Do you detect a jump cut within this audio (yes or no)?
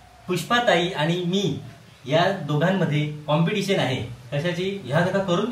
no